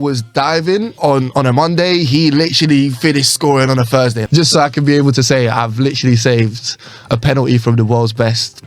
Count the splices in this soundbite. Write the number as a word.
two